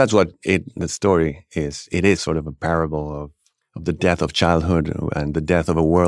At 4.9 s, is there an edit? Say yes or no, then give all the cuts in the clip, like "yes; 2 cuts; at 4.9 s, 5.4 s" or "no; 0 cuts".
no; 1 cut; at 2.2 s